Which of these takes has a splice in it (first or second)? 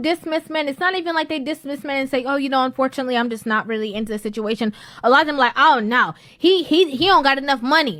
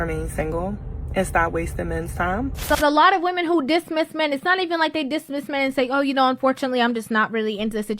second